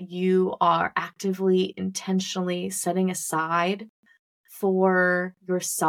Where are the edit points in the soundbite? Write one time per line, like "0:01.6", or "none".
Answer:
none